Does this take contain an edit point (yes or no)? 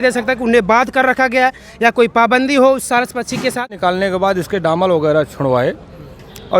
yes